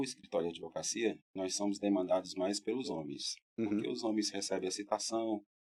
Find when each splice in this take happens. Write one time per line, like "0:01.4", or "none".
none